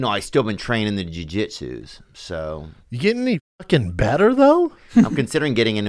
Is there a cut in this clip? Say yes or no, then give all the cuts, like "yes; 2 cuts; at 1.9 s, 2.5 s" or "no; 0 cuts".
no; 0 cuts